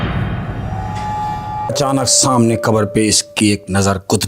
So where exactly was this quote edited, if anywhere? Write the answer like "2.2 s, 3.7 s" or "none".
1.7 s